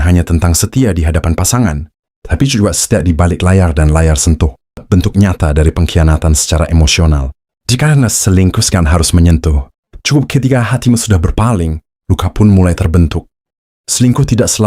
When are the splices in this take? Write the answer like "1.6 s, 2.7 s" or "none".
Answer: 4.8 s